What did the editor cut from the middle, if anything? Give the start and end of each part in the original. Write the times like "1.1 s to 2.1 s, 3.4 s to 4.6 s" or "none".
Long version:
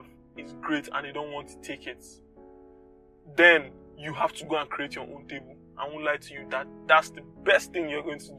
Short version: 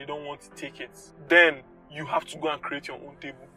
2.1 s to 3.1 s